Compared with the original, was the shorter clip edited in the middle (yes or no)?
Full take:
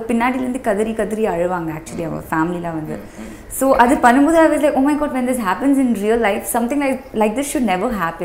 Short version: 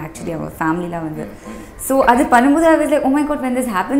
no